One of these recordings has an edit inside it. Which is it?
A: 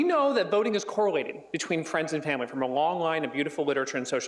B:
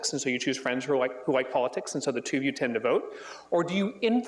B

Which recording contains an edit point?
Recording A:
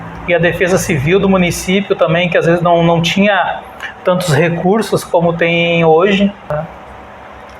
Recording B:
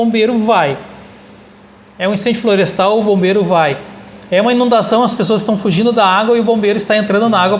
A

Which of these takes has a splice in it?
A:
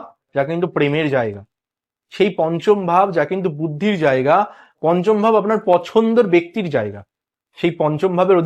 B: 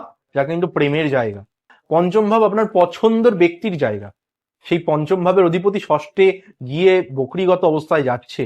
B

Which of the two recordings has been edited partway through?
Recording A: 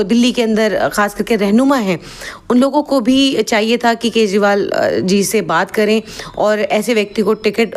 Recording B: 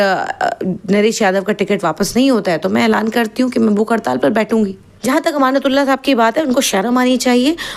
B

